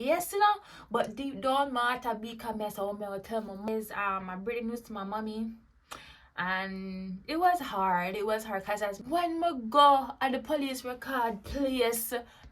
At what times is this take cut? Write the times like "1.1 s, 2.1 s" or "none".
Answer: 3.7 s, 9.0 s